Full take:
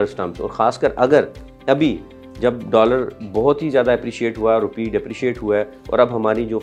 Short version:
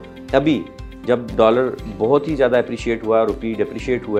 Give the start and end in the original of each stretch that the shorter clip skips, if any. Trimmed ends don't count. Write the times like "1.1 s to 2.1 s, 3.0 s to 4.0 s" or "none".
none